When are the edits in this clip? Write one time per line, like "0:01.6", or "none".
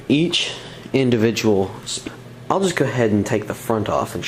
none